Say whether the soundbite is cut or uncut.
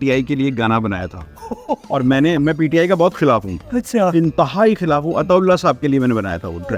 uncut